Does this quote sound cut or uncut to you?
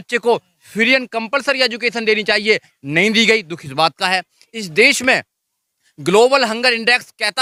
uncut